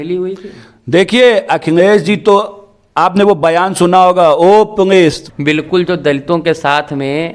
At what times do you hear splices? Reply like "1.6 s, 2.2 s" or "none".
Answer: 5.2 s